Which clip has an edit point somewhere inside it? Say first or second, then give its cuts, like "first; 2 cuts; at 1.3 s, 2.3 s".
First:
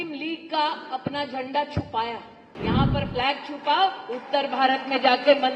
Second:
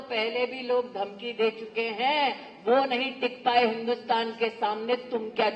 first; 1 cut; at 2.5 s